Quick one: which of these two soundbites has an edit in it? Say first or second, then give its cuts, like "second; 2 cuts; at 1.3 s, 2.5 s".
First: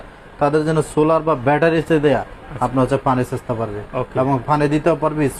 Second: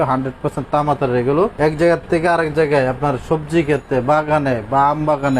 second; 1 cut; at 1.5 s